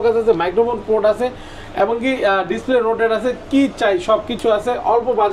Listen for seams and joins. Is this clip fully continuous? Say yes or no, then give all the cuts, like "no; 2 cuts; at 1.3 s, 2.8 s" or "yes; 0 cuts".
yes; 0 cuts